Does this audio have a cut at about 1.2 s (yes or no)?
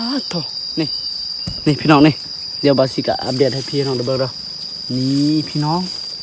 no